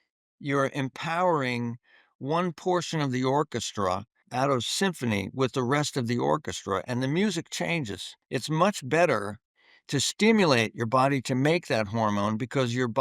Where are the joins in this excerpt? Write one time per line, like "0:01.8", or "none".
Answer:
0:04.2